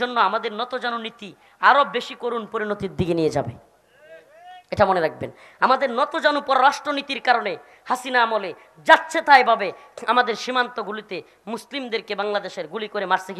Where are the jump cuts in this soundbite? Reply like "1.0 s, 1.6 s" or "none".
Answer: none